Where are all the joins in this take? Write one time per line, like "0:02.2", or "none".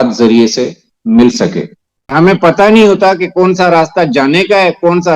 0:02.0

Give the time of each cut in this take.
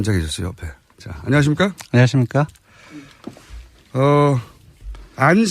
0:02.0

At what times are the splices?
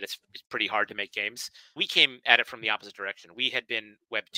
0:01.8
0:03.3

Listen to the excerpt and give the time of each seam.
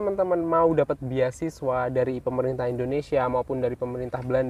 none

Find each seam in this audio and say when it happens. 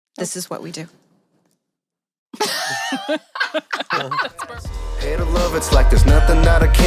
0:04.7

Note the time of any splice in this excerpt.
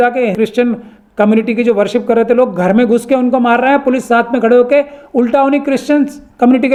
none

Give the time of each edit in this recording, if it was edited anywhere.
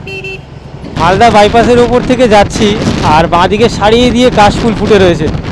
0:00.9

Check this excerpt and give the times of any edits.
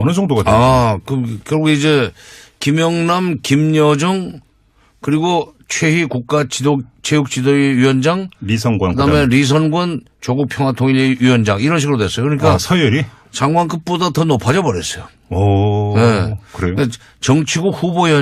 none

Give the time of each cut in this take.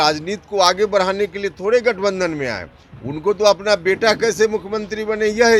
none

